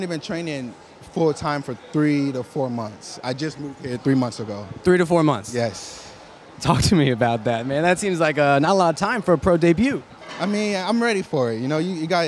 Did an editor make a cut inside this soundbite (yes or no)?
no